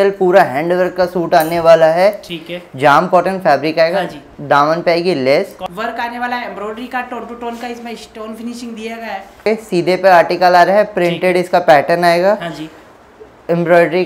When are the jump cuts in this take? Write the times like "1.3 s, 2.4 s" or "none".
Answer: 5.6 s, 9.5 s